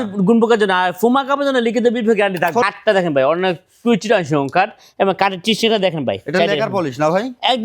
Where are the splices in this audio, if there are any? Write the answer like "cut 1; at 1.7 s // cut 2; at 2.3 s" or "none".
cut 1; at 2.6 s